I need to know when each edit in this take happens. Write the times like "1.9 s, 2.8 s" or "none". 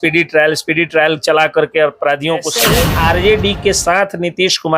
2.6 s